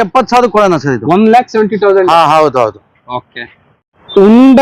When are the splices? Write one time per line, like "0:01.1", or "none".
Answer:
none